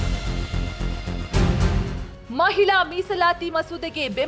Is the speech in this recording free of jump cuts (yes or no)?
no